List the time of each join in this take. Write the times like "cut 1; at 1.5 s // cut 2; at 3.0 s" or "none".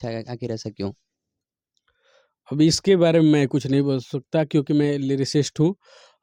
none